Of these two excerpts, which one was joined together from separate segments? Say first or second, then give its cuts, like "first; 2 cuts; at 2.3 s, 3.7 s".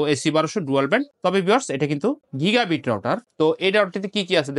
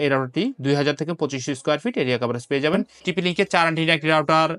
second; 1 cut; at 2.9 s